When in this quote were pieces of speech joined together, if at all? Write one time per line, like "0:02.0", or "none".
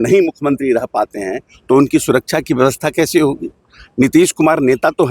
none